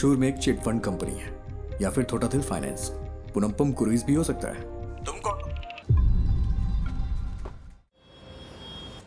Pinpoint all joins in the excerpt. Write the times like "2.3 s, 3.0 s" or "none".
5.7 s, 8.0 s